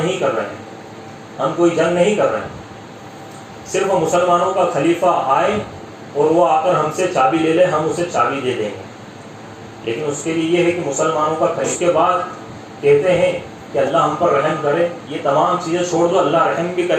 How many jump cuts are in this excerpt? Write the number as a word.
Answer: one